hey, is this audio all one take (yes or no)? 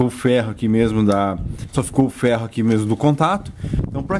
no